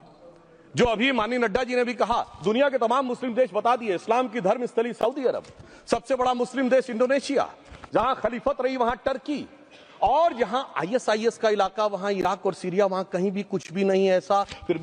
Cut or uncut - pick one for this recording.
uncut